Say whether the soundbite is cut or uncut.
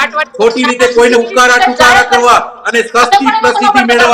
uncut